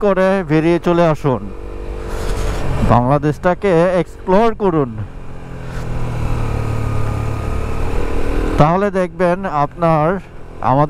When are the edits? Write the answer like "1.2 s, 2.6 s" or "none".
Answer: none